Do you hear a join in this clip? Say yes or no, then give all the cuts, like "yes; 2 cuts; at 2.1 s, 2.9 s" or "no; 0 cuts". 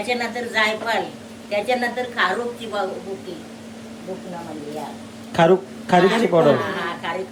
no; 0 cuts